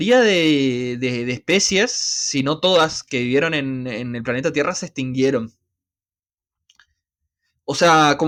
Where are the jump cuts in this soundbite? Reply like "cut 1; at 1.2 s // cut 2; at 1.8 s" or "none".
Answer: none